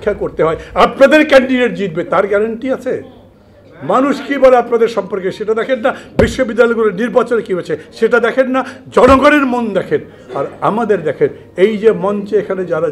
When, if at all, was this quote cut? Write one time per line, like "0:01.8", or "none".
none